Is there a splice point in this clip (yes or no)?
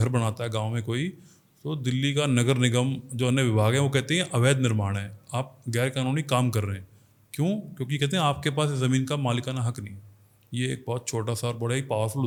no